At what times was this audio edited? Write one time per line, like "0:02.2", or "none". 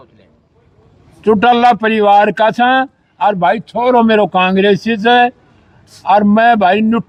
none